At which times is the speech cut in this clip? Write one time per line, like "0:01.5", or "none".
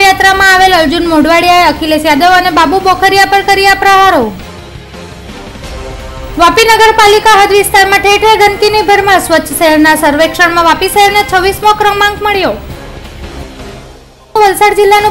none